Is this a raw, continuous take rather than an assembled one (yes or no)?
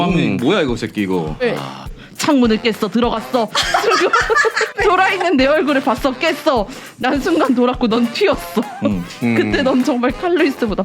no